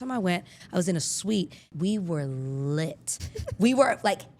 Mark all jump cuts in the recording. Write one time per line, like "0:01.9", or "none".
0:01.7